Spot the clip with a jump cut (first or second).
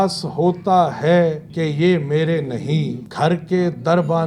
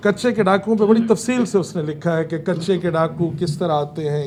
first